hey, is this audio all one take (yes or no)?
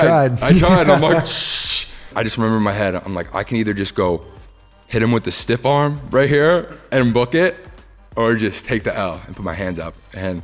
no